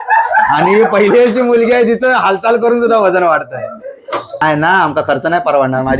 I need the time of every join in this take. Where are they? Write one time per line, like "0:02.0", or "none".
0:04.4